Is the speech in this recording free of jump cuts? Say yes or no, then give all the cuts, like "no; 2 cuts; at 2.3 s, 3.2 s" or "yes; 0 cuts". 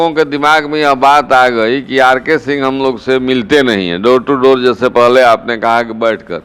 yes; 0 cuts